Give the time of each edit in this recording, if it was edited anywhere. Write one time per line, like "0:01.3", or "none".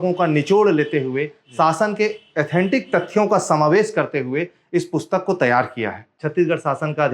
0:06.2

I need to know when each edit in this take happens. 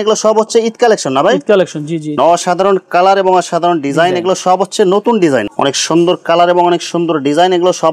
0:02.1
0:05.5

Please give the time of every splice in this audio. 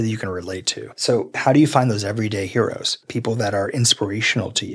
0:03.0

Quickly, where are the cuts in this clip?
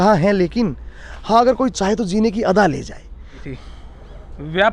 0:03.4

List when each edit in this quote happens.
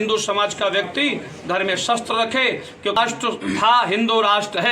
0:03.0

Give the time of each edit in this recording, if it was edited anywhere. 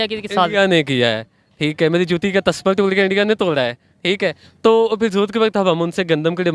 none

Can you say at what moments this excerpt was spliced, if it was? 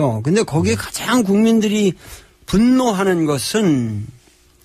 0:01.7

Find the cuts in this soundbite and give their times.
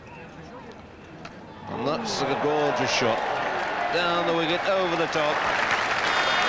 0:05.4

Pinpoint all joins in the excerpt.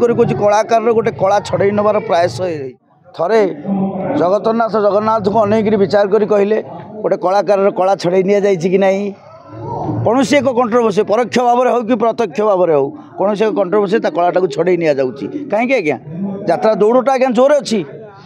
0:02.8

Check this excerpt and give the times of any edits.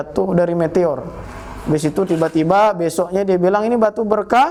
none

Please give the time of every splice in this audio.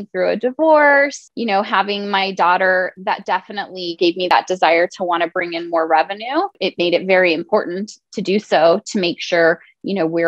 0:01.2
0:04.3
0:06.6

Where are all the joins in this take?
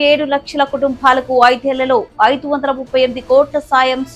none

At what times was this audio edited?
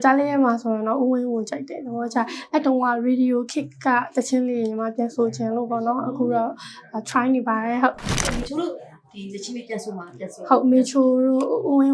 0:08.1

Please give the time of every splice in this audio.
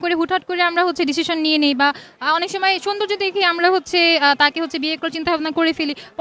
none

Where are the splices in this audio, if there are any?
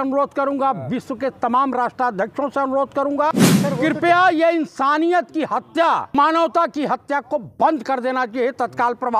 0:03.3
0:06.1

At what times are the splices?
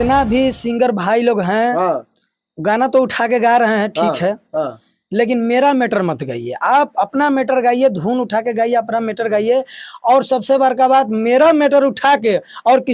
none

